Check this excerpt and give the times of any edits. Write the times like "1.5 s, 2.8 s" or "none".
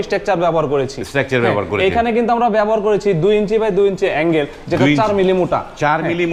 none